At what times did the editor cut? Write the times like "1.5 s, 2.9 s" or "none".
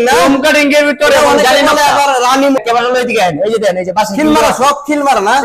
2.6 s